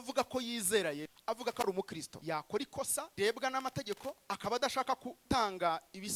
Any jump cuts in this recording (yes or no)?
yes